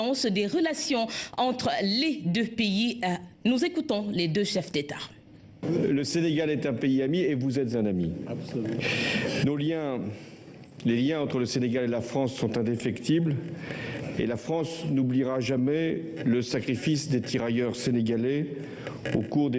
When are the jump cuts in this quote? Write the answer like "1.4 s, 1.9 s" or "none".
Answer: 16.1 s